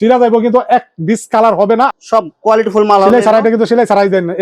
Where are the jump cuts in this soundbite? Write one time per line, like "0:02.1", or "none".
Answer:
0:01.9

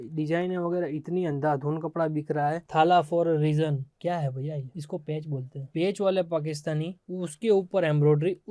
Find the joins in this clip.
0:03.9

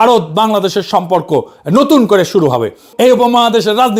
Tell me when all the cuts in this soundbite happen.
none

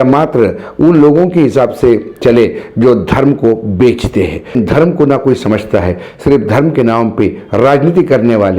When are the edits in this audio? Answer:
0:04.5

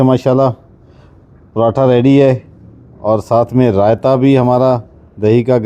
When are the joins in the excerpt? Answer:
none

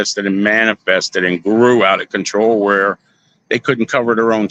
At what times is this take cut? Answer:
none

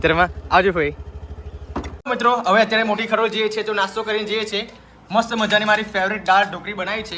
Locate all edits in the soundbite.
0:01.9

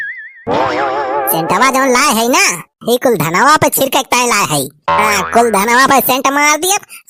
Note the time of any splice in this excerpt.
none

